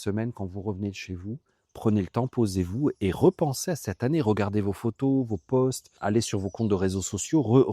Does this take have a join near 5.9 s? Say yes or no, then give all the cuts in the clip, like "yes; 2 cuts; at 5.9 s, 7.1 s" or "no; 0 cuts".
yes; 1 cut; at 5.9 s